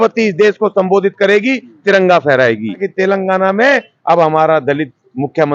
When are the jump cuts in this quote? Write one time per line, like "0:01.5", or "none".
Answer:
0:02.9